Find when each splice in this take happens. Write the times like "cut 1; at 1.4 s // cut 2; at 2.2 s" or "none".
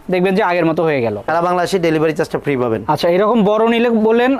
cut 1; at 1.2 s